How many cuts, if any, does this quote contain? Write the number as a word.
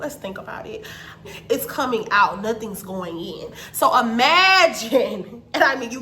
one